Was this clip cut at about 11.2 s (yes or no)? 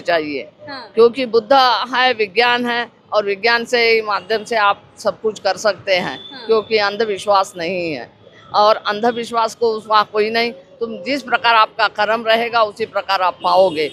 no